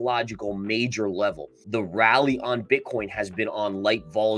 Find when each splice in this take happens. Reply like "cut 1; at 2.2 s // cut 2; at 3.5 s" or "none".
cut 1; at 1.5 s